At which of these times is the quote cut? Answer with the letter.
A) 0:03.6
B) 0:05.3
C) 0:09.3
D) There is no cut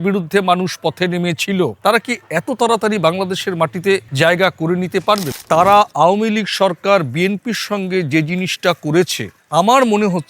B